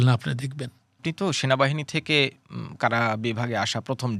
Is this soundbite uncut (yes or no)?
no